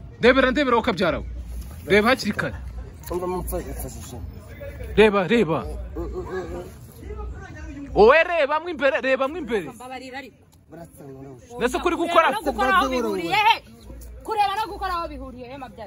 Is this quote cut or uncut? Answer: uncut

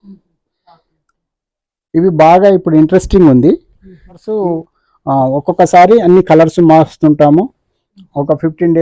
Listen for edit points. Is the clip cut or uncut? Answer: cut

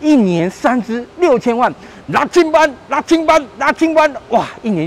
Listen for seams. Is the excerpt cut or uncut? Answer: uncut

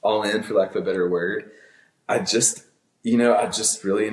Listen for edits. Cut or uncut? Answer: uncut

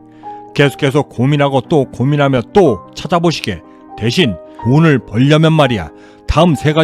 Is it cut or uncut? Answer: cut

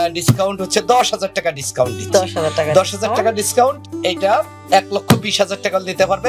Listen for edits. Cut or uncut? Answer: uncut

